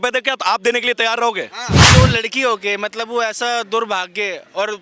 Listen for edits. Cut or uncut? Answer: cut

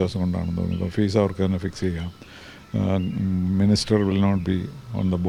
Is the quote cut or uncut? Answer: uncut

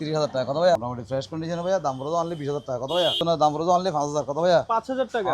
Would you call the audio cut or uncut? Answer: cut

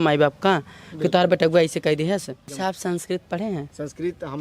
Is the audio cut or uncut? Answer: cut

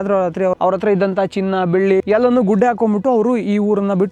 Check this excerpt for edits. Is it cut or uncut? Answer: uncut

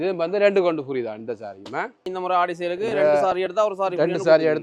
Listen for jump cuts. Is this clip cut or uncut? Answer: cut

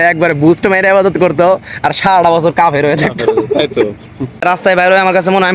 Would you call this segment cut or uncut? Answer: cut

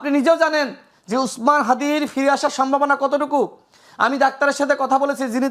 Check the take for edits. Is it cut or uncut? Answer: uncut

